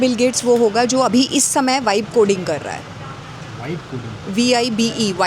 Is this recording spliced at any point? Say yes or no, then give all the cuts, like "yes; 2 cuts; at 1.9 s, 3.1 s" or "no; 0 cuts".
no; 0 cuts